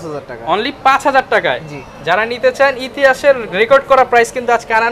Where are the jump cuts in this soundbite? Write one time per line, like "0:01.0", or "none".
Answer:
none